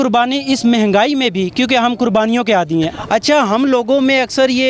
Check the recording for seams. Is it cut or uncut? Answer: cut